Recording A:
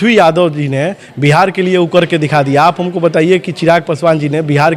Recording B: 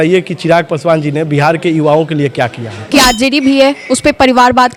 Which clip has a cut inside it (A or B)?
B